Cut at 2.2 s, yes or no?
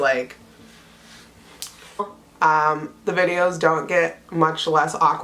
yes